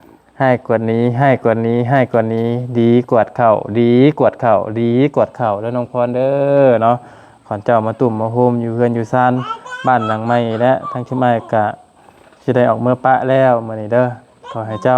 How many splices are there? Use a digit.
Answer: 0